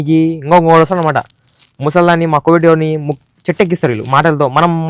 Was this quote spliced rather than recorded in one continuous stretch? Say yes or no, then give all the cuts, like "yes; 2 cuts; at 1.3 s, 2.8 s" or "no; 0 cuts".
no; 0 cuts